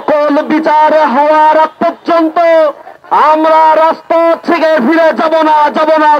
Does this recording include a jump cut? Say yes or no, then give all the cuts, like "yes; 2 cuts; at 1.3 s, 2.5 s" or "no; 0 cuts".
no; 0 cuts